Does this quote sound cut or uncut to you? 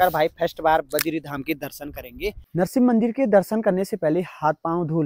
cut